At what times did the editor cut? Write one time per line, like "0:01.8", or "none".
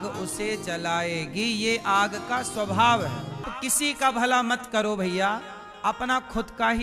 0:03.5